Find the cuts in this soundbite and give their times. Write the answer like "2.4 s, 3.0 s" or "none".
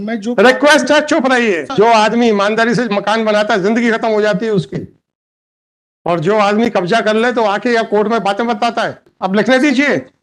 1.6 s, 9.1 s